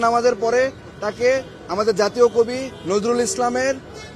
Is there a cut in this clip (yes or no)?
no